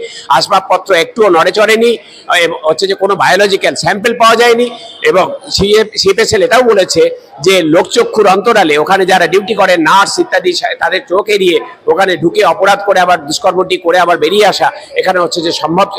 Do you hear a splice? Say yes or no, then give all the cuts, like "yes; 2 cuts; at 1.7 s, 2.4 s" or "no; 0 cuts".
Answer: no; 0 cuts